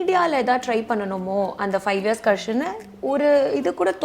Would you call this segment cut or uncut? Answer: uncut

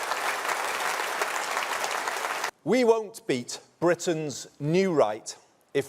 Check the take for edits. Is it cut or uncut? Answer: cut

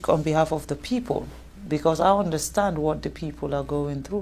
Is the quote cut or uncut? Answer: uncut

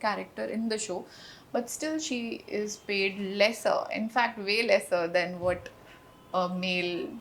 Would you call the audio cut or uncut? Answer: uncut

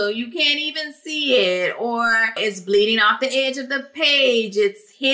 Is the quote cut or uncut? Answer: cut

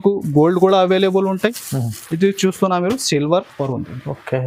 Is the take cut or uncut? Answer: cut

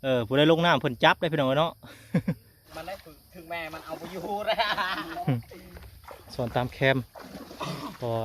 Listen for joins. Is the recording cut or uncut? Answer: cut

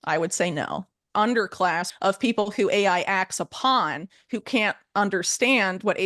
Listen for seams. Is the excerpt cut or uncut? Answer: cut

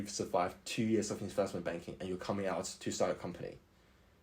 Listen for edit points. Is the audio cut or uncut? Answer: uncut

